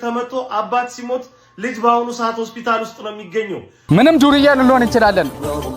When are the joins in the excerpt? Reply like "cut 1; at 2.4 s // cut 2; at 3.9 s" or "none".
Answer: cut 1; at 3.9 s